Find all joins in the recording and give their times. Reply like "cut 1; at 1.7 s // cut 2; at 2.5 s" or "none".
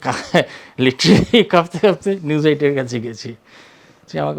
none